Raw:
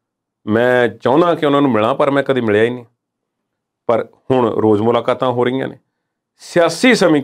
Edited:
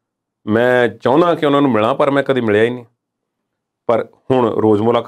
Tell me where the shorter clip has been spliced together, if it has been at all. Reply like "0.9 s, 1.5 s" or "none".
none